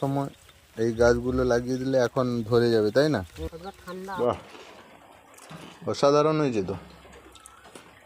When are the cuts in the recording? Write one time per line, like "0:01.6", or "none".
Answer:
0:04.1